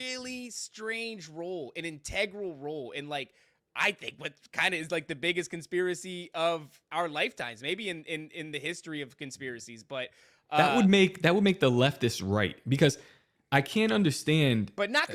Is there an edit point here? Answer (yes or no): no